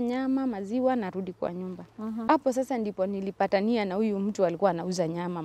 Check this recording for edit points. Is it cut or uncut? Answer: cut